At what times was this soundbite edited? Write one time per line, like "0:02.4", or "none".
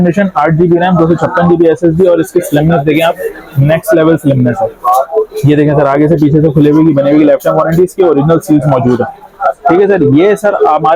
none